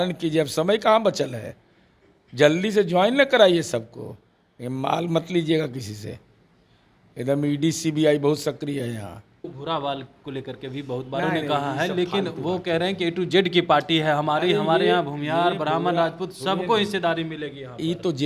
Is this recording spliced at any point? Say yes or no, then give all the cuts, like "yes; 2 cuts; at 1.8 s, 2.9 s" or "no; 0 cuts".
yes; 1 cut; at 9.5 s